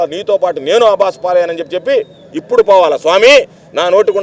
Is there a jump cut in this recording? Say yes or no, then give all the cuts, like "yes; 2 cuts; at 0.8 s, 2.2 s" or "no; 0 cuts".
no; 0 cuts